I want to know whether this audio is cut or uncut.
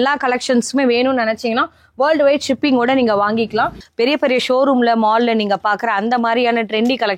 cut